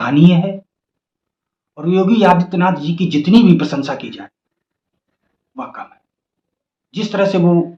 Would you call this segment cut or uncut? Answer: uncut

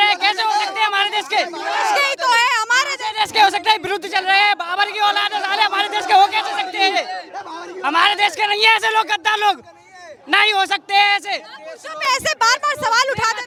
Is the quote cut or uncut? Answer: uncut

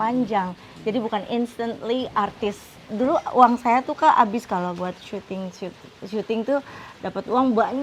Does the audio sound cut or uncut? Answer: cut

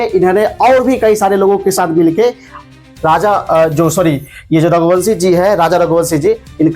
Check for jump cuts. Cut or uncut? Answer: uncut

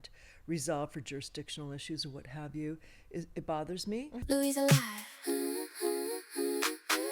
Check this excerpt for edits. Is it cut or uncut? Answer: cut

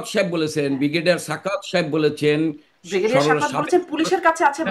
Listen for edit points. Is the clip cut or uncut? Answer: uncut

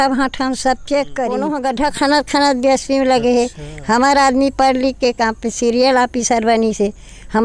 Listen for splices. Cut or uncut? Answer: cut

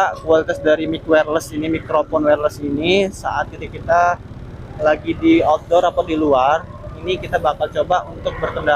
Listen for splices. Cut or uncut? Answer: uncut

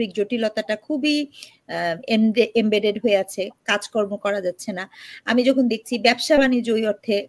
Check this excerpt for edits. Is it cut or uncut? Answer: uncut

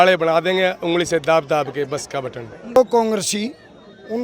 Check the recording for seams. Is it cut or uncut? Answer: cut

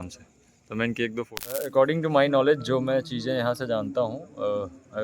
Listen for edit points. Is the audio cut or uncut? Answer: cut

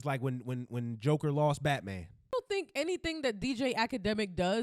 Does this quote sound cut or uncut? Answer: cut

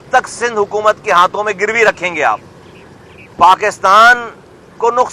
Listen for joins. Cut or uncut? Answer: uncut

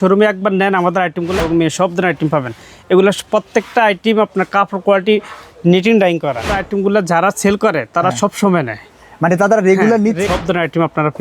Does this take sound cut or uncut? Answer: cut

